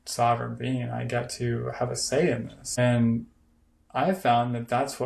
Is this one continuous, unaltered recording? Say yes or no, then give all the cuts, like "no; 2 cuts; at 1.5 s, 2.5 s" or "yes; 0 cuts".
no; 1 cut; at 2.6 s